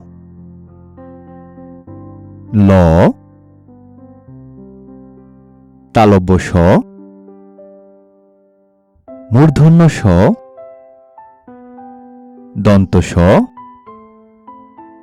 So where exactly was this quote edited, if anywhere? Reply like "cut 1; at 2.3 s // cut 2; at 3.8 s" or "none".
none